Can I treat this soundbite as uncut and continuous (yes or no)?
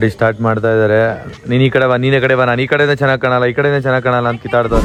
yes